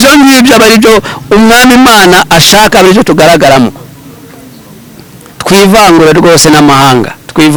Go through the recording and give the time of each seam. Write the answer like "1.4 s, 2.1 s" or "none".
none

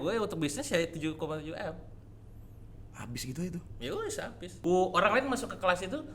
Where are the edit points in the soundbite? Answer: 4.6 s

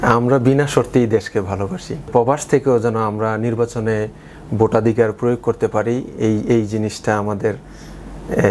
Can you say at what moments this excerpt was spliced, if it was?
2.1 s

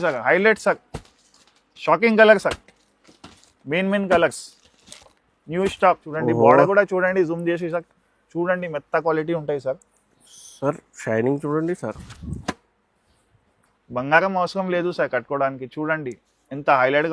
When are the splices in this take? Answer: 6.1 s

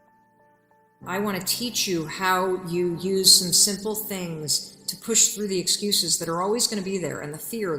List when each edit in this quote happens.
1.0 s

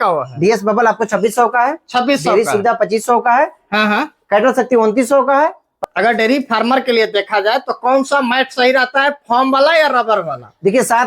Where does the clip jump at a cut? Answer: 5.7 s

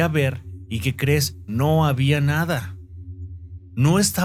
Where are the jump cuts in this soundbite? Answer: none

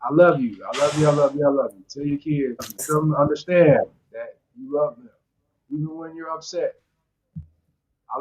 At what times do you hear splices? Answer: 2.9 s

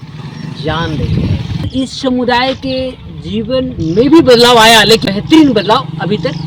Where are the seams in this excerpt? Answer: 1.6 s, 5.1 s

